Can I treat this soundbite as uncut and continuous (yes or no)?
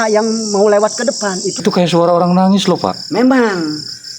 no